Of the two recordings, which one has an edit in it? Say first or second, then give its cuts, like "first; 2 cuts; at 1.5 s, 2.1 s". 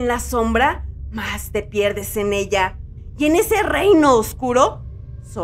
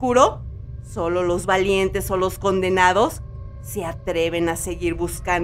first; 1 cut; at 3.0 s